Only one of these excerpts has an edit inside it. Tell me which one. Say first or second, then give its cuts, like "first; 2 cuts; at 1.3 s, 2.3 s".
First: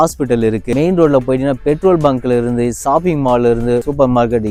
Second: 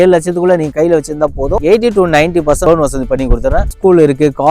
second; 2 cuts; at 1.6 s, 3.7 s